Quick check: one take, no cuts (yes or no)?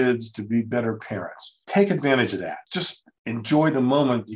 no